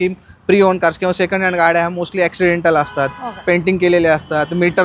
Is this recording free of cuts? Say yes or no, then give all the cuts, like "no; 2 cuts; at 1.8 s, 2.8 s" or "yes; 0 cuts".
yes; 0 cuts